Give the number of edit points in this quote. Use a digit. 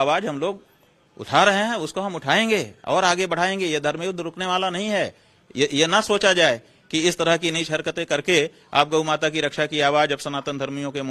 1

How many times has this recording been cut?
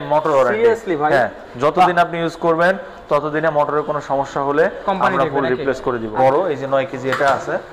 1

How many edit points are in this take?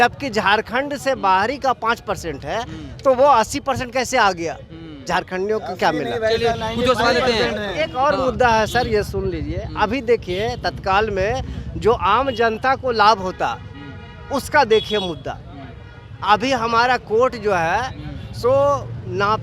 0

